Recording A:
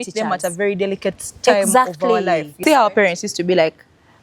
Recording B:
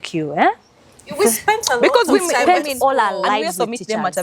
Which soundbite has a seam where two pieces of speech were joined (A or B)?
A